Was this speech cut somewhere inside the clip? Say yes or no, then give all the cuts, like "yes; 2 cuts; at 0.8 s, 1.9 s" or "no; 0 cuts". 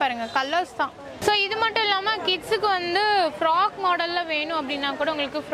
yes; 1 cut; at 1.1 s